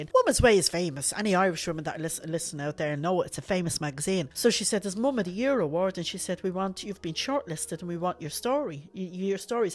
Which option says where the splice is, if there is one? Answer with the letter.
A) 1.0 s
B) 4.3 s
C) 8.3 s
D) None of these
B